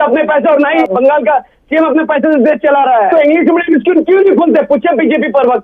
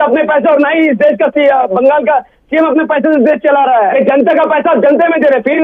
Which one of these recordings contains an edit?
first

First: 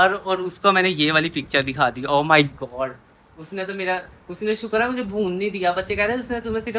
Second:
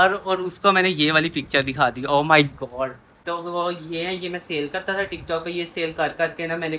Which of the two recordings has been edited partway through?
second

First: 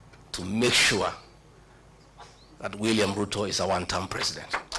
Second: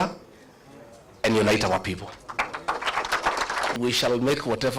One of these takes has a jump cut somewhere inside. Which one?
second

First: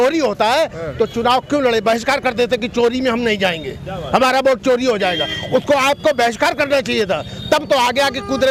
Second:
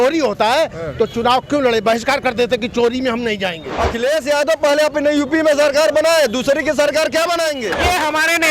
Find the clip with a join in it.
second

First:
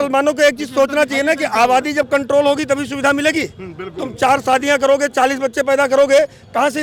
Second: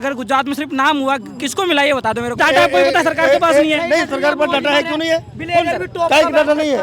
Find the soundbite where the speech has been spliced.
second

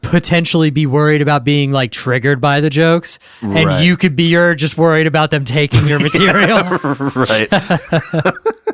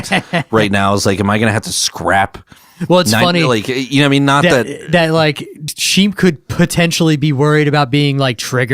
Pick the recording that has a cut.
second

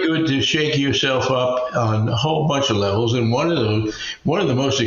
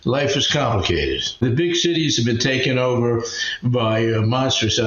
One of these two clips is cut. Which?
second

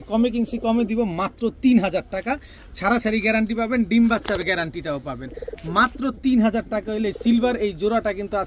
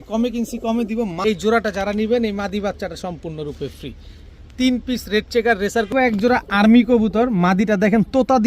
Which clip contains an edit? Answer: second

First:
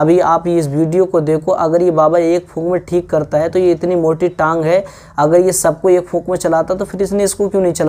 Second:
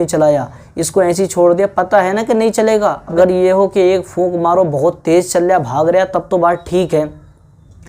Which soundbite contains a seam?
second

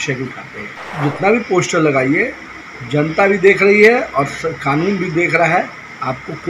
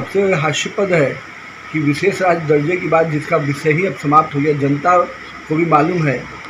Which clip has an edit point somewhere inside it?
first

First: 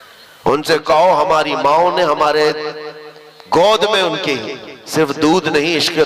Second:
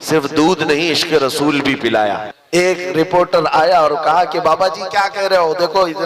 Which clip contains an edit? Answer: second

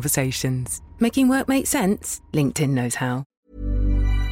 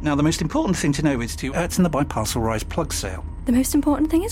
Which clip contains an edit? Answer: first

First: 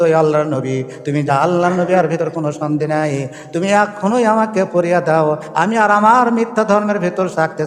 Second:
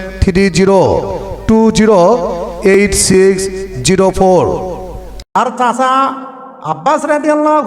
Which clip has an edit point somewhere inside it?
second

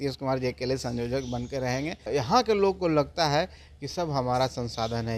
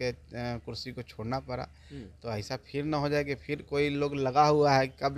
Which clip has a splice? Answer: first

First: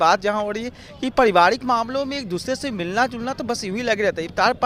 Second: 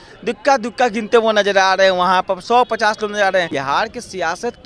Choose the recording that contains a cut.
second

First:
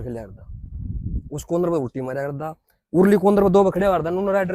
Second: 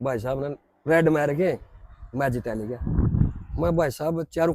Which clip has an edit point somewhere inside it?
second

